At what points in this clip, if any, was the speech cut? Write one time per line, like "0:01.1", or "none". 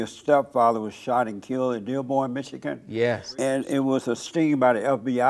0:03.3
0:04.2